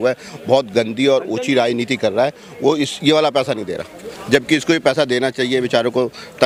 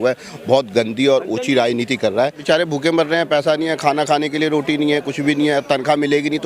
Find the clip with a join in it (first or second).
second